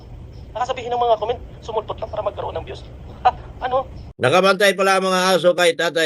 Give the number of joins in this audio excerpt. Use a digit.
1